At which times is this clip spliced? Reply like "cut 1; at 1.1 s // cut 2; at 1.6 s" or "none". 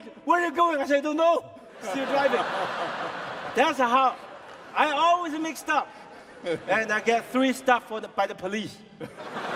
none